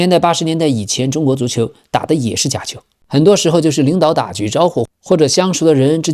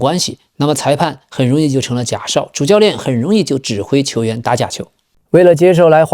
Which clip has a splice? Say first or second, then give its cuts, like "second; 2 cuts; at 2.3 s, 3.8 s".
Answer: second; 1 cut; at 5.1 s